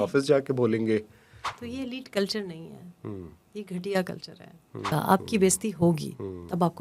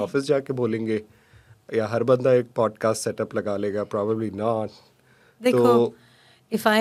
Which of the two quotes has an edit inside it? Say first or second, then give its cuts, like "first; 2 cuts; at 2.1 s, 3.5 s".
first; 2 cuts; at 1.6 s, 4.9 s